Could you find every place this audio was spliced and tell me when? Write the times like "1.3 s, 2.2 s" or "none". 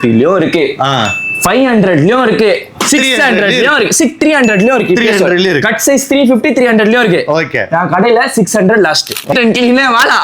9.3 s